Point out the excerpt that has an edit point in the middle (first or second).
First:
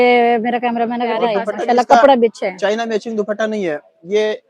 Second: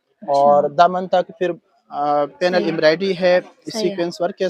first